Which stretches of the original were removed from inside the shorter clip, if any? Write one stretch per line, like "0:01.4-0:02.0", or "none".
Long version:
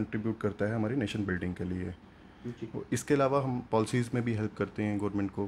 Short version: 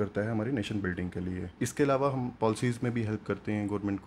0:02.0-0:02.8